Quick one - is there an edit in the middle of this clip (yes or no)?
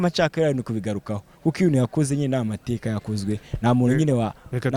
no